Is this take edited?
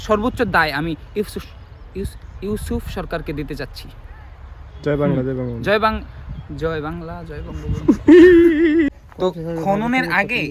no; 0 cuts

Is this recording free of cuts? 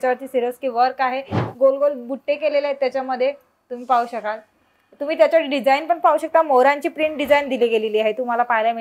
no; 1 cut; at 1.4 s

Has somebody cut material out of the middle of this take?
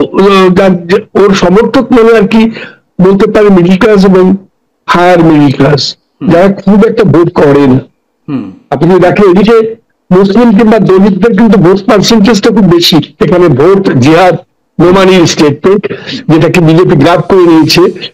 yes; 1 cut; at 13.1 s

